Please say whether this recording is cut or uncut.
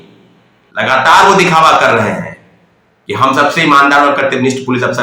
uncut